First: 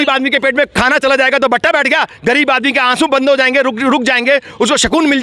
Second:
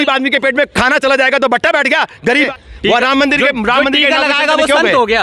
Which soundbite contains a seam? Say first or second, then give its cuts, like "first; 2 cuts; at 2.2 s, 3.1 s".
second; 1 cut; at 2.5 s